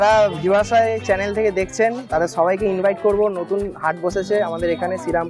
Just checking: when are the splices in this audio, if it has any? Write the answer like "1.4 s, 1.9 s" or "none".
none